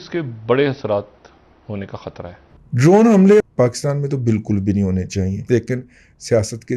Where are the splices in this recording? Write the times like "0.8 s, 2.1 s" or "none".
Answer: 2.5 s, 3.4 s, 5.4 s

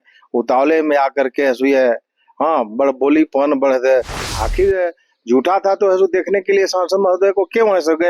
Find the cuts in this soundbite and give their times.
4.2 s

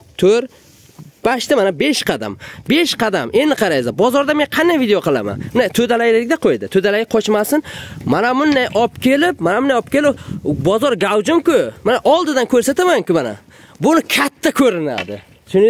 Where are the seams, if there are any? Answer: none

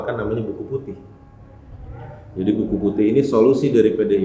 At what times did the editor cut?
none

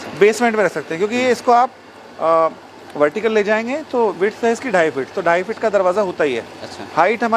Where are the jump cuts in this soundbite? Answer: none

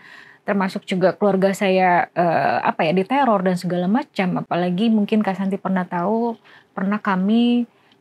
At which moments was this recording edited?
none

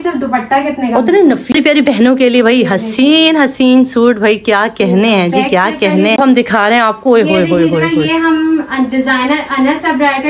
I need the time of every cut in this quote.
1.4 s, 6.1 s

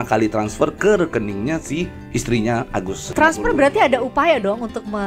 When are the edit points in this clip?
3.0 s

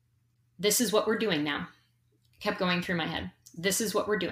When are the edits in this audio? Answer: none

